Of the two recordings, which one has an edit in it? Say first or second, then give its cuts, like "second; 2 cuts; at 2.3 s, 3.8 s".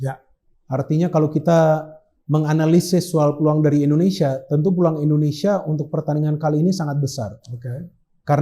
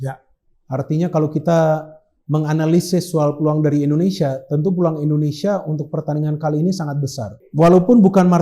second; 1 cut; at 7.4 s